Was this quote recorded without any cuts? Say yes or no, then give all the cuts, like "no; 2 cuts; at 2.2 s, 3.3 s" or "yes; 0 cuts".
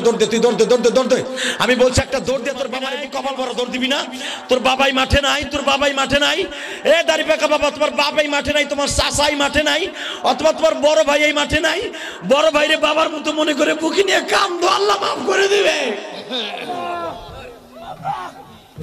no; 1 cut; at 2.8 s